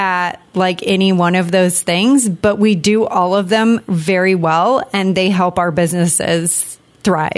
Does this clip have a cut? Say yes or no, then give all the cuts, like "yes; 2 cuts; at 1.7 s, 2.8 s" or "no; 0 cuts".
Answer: yes; 1 cut; at 6.5 s